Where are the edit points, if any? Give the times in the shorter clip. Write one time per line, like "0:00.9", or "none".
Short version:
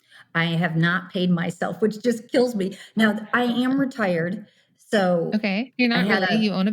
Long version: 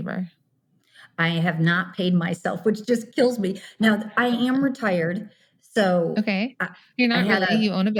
0:05.7